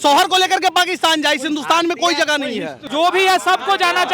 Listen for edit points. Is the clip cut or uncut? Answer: cut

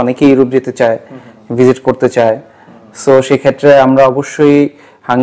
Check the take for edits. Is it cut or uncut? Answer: uncut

